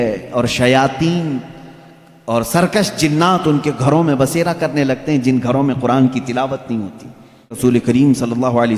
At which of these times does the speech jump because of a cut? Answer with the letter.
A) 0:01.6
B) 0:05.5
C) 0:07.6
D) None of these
C